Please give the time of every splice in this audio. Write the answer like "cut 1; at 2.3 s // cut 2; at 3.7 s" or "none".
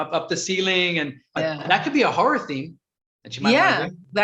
cut 1; at 1.3 s